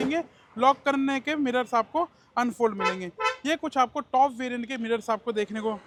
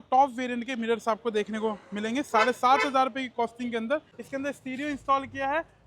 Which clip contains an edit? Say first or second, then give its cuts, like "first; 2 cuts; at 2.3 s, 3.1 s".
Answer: second; 1 cut; at 4.2 s